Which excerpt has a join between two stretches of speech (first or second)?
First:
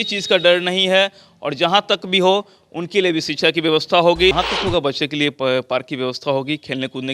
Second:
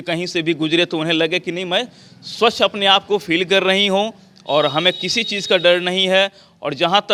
first